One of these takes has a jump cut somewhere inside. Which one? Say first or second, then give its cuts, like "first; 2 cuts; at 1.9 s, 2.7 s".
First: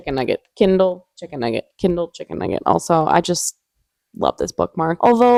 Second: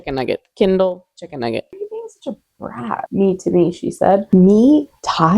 second; 2 cuts; at 1.7 s, 4.2 s